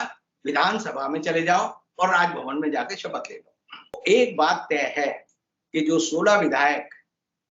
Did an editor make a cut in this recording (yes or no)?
yes